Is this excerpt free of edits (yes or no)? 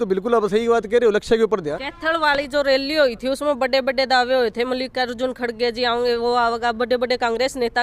no